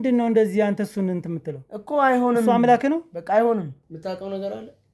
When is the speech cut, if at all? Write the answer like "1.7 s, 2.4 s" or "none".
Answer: 3.8 s